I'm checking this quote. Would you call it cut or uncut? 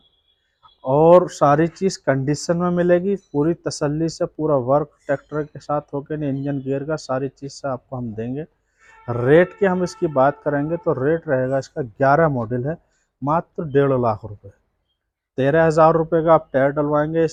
uncut